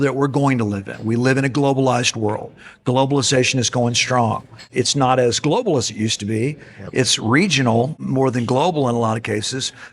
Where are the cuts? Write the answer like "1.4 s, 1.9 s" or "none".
4.7 s, 8.0 s